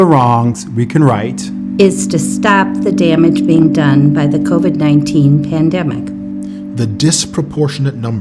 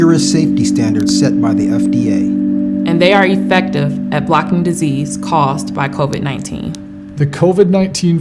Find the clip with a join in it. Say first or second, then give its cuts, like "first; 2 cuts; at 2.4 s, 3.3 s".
first; 1 cut; at 3.5 s